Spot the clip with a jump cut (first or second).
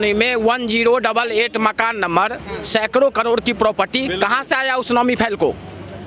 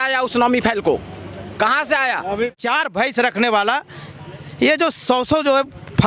second